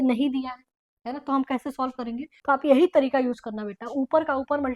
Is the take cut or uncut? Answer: cut